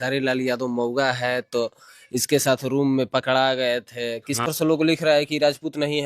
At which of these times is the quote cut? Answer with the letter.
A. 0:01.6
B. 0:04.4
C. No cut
B